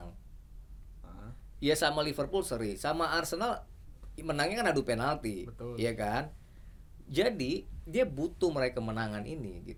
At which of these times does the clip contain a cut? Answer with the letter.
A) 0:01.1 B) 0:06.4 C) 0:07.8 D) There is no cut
D